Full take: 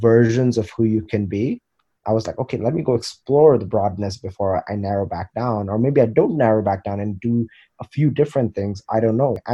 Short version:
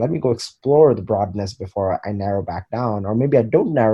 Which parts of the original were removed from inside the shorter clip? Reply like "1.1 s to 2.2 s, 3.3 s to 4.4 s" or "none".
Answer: none